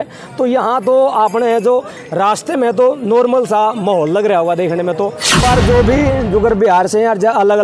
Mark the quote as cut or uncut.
cut